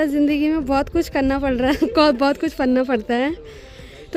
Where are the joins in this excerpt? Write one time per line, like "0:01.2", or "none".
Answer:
none